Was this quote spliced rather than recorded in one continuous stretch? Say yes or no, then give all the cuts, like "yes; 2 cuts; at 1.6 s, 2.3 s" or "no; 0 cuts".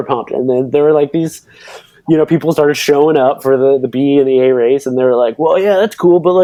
no; 0 cuts